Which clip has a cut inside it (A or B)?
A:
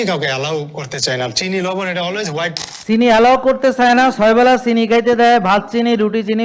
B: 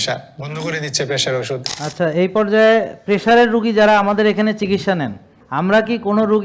B